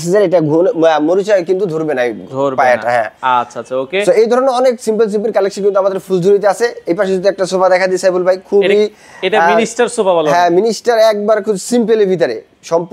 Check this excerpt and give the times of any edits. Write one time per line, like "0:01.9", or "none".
none